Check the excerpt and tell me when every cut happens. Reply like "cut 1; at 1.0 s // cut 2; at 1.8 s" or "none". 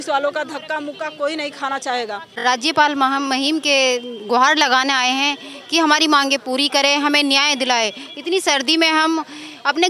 cut 1; at 2.3 s